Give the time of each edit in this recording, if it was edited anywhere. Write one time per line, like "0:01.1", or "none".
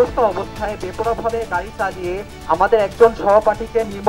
none